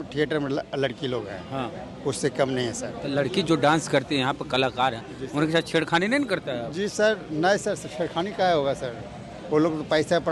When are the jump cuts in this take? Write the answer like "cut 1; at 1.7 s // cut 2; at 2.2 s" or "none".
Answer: none